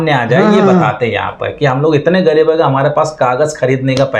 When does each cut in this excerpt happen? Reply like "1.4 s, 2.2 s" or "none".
none